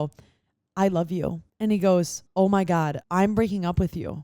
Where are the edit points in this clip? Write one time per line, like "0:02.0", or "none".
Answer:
0:01.5
0:02.2
0:03.0